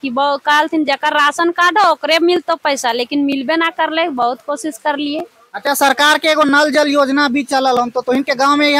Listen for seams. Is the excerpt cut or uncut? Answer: uncut